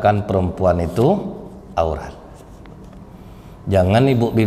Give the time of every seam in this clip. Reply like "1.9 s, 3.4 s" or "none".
none